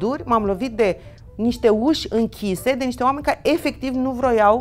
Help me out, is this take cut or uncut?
uncut